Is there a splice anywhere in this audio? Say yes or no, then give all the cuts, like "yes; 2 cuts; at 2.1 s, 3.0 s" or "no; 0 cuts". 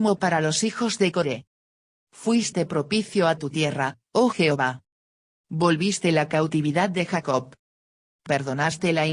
yes; 2 cuts; at 1.7 s, 4.0 s